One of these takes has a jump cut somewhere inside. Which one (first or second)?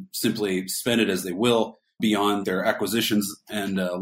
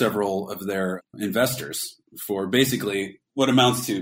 second